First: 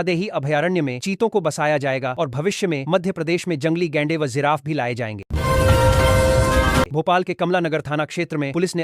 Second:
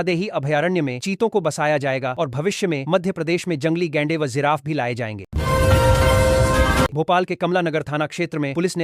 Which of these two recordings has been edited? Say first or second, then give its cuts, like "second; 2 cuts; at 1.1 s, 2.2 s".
first; 2 cuts; at 5.3 s, 6.9 s